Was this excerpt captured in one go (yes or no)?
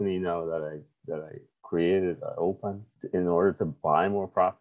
yes